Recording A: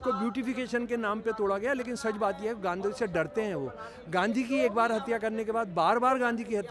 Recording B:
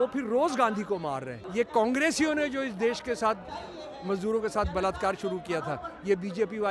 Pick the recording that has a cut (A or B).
B